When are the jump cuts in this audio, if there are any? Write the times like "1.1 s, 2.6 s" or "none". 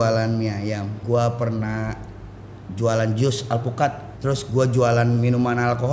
0.9 s, 4.1 s